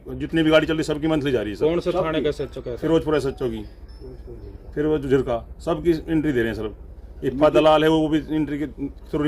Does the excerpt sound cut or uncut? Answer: uncut